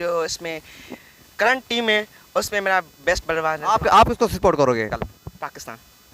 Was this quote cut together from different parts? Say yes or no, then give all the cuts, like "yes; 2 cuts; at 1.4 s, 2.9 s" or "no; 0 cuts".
no; 0 cuts